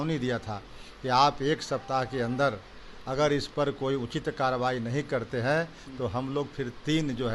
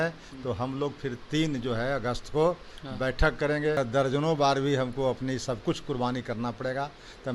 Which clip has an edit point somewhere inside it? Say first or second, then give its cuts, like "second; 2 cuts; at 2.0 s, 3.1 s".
second; 1 cut; at 3.8 s